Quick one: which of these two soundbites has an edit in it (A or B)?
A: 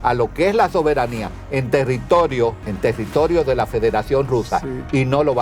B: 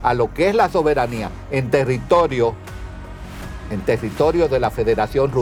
A